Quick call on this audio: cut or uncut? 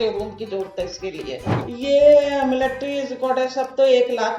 cut